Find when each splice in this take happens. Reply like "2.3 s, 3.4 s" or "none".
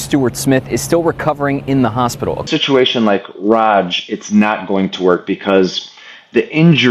2.5 s